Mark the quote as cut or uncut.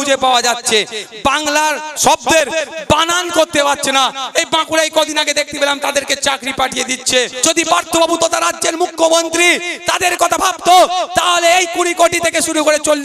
cut